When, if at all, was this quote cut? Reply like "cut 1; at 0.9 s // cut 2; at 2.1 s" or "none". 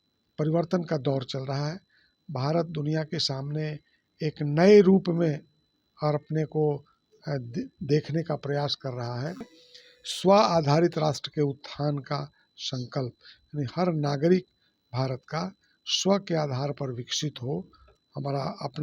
none